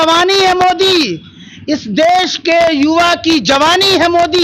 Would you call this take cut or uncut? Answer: uncut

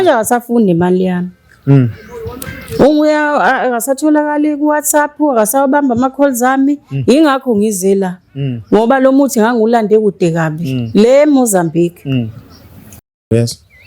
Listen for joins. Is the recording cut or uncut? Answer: cut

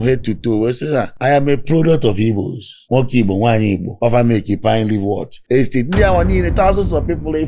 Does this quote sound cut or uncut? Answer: uncut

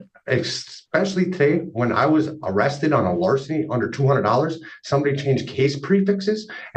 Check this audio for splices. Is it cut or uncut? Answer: uncut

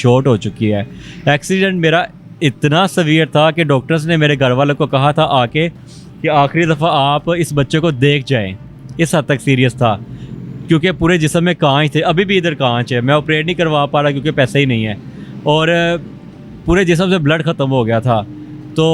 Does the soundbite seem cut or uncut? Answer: uncut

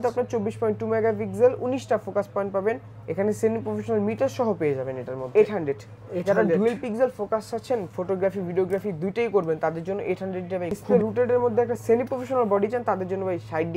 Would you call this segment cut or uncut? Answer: cut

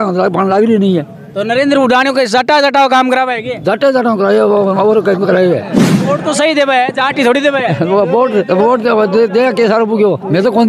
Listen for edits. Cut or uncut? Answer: cut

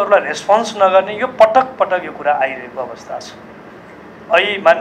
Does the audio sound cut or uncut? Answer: uncut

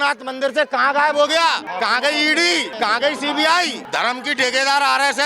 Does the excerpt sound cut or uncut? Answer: cut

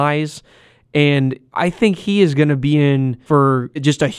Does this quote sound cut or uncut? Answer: cut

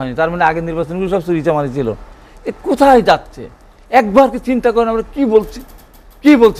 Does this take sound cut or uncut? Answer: uncut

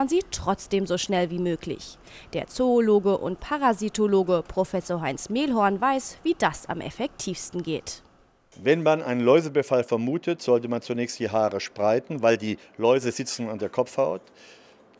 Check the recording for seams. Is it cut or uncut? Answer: uncut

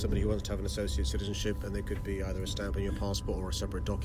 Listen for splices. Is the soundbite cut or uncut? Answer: uncut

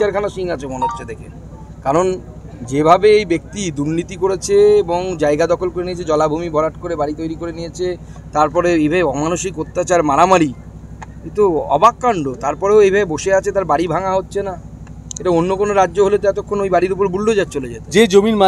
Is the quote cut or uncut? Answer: uncut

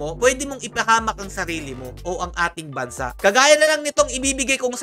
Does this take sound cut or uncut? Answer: uncut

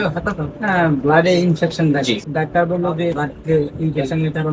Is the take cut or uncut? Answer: cut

